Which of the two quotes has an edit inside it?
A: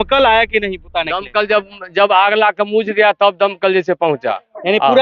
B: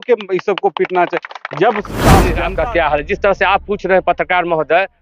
B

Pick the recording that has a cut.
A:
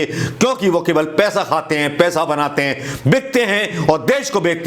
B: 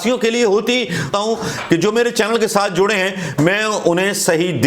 B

